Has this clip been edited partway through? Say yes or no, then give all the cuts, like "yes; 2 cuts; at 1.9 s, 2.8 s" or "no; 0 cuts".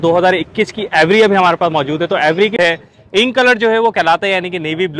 yes; 1 cut; at 2.6 s